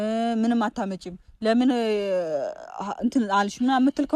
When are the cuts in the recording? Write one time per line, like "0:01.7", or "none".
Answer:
none